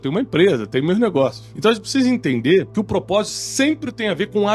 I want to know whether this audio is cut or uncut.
cut